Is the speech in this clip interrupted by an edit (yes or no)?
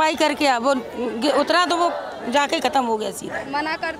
no